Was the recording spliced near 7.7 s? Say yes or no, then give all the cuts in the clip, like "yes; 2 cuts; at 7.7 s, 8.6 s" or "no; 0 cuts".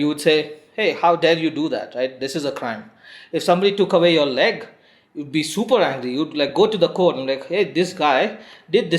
yes; 1 cut; at 7.7 s